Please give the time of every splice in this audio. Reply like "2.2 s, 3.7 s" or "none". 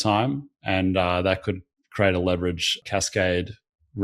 2.8 s

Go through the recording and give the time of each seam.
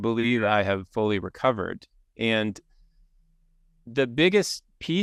none

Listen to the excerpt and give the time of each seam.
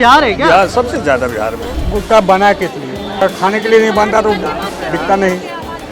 1.7 s, 3.2 s

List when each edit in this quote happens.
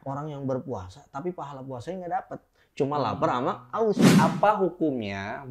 4.1 s

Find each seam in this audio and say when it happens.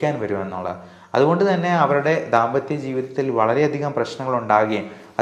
none

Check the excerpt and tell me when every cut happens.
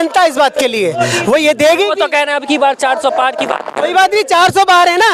none

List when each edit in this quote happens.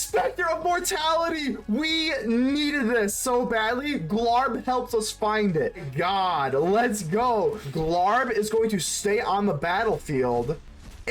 5.9 s, 7.7 s

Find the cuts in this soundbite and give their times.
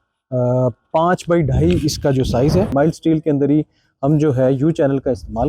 2.7 s

